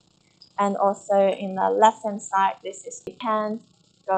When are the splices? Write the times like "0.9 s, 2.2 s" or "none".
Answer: 3.1 s